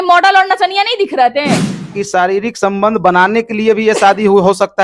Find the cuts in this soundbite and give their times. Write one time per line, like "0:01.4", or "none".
0:01.9